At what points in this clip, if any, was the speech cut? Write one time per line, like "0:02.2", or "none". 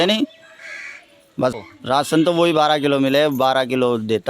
0:01.5